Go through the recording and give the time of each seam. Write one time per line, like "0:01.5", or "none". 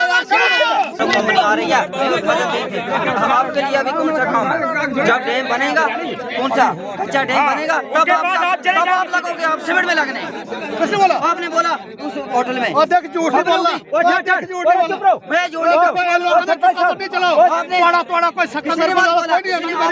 0:01.1